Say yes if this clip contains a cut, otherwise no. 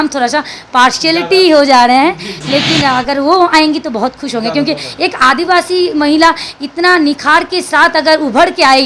no